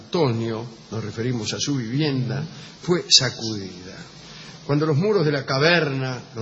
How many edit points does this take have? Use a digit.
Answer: 0